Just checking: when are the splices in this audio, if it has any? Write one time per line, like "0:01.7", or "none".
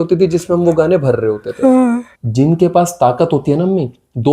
0:02.2